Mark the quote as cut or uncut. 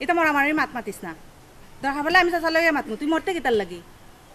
uncut